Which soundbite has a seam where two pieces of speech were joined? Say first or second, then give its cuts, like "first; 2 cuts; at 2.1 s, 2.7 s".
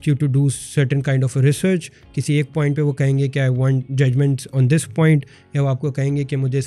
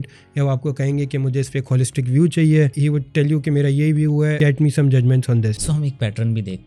second; 3 cuts; at 2.7 s, 4.4 s, 5.6 s